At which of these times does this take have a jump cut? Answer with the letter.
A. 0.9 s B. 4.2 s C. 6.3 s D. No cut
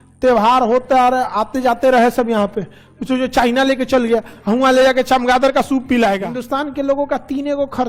C